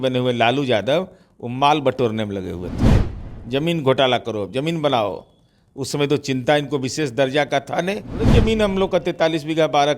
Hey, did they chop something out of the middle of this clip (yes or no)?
yes